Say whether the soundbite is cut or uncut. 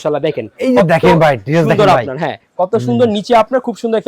uncut